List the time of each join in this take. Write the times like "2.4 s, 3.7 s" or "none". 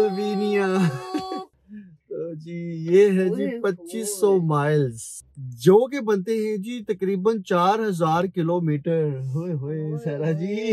1.5 s